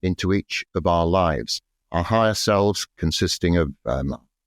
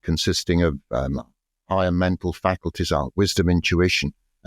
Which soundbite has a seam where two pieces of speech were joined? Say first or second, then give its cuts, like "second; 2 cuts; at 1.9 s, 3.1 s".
first; 1 cut; at 1.8 s